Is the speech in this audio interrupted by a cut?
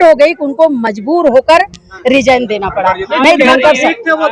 no; 0 cuts

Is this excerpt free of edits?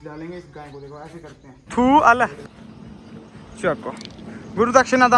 no; 1 cut; at 1.7 s

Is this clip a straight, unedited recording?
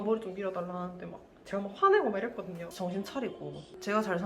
no; 1 cut; at 2.7 s

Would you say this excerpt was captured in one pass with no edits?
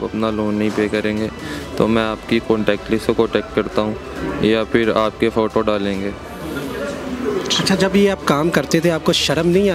yes; 0 cuts

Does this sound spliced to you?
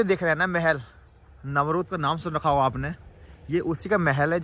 no; 0 cuts

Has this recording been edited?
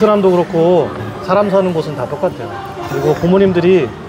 no; 0 cuts

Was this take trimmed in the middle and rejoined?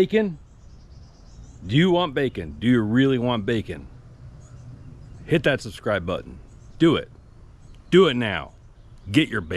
no; 0 cuts

